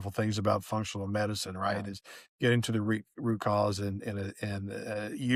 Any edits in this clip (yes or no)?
no